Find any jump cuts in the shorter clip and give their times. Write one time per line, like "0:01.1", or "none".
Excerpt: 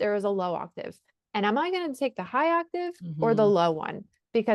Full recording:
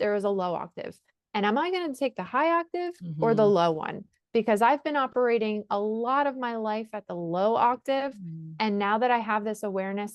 none